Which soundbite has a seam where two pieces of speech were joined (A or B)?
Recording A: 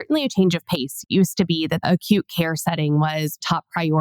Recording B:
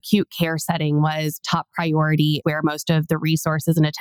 A